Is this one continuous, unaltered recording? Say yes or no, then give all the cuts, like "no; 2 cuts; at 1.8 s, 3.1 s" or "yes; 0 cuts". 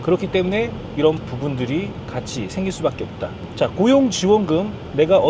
yes; 0 cuts